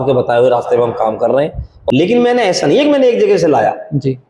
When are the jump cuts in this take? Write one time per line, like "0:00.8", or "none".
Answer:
0:01.7